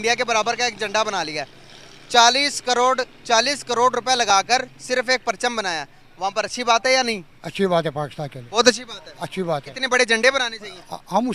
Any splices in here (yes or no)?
no